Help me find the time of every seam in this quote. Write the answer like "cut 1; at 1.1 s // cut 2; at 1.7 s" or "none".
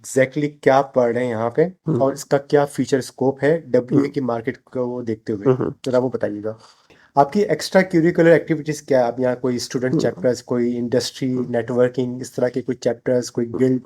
cut 1; at 6.9 s